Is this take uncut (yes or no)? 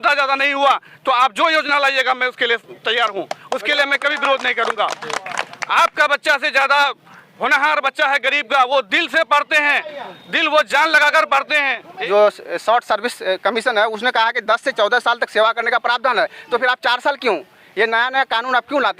no